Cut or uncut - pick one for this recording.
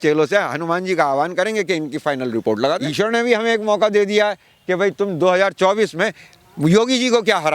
cut